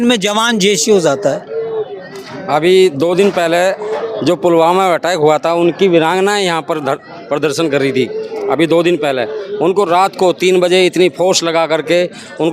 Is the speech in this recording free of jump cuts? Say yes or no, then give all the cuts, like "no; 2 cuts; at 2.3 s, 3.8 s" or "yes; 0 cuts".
yes; 0 cuts